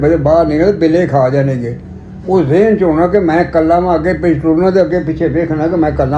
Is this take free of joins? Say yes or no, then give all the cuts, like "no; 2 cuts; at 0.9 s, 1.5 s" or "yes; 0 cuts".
yes; 0 cuts